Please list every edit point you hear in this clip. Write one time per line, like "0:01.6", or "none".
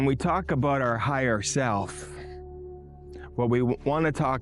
0:01.9
0:03.3

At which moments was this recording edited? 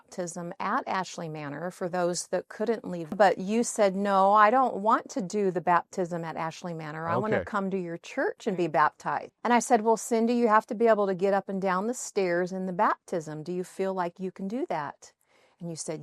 0:03.2
0:09.2

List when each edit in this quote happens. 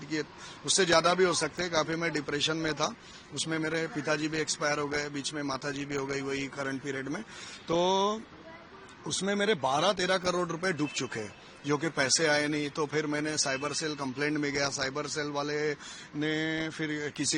none

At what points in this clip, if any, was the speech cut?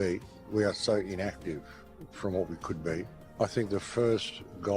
0:03.2

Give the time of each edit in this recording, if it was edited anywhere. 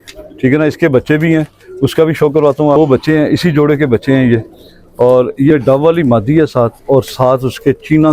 0:02.8
0:05.5

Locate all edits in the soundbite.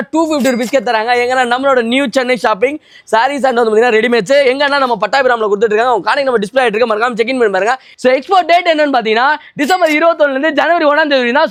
none

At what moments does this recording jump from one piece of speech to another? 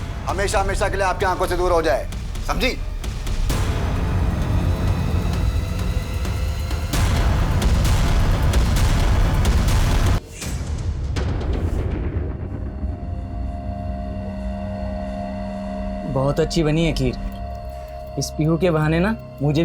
0:10.2

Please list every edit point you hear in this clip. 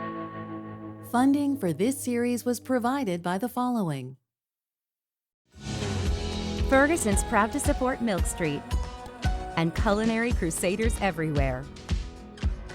0:01.0

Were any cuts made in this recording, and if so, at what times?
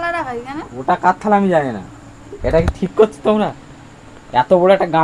0:02.3

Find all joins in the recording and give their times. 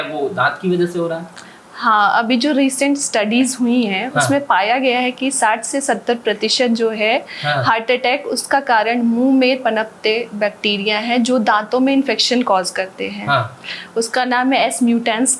none

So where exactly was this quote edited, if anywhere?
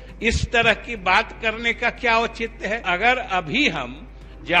0:02.8

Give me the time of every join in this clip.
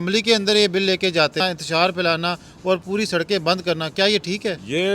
0:01.4

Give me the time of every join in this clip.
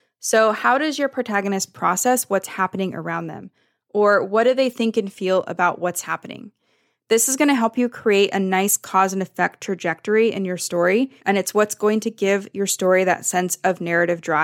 0:11.2

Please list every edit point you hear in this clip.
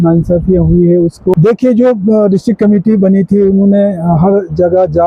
0:01.3

